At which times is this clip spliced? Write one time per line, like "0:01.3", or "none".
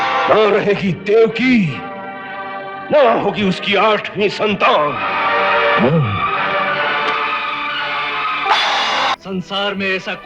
0:09.1